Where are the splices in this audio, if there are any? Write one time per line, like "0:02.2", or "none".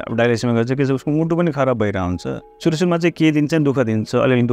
0:02.6